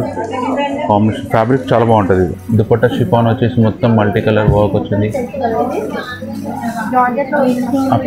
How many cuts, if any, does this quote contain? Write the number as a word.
one